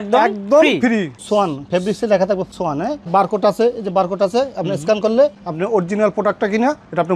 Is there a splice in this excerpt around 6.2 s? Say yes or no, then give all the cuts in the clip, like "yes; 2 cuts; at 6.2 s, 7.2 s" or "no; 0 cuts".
no; 2 cuts; at 1.1 s, 3.1 s